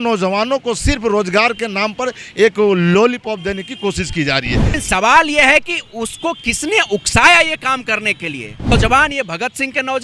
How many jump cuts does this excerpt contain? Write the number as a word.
two